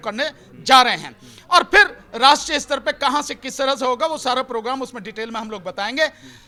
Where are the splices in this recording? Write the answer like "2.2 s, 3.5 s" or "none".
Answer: none